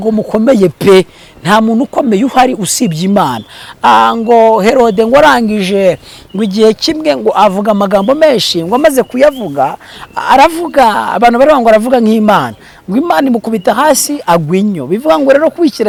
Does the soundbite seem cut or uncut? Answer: uncut